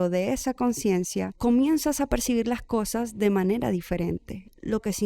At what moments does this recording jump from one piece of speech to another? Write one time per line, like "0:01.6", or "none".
0:01.3